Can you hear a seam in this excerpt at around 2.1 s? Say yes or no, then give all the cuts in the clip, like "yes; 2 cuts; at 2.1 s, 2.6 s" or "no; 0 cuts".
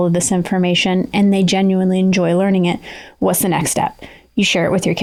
no; 0 cuts